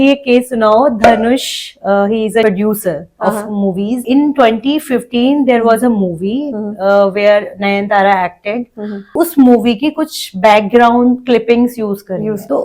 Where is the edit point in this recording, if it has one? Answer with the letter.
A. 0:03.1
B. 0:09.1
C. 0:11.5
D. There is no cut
B